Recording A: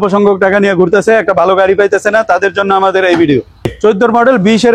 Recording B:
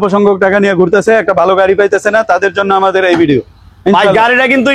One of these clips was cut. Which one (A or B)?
A